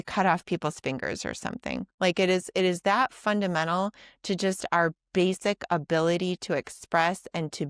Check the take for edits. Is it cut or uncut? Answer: uncut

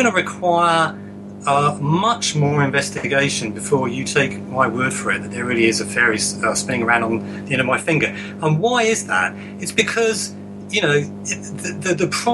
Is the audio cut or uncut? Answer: uncut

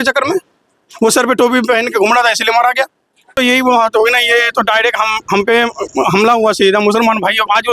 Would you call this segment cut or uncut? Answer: cut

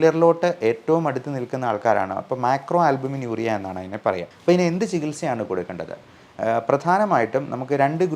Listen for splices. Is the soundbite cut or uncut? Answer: cut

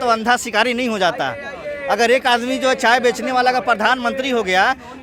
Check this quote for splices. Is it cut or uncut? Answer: uncut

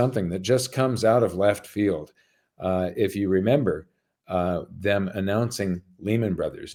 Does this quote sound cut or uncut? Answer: uncut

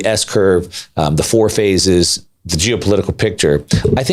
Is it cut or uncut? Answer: uncut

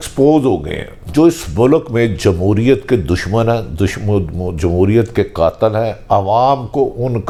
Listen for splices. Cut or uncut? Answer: uncut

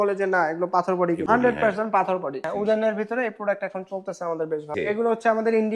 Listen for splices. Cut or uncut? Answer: cut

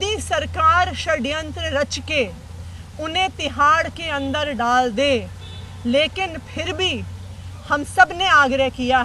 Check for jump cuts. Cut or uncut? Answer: uncut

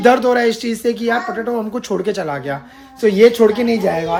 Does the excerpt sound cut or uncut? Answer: uncut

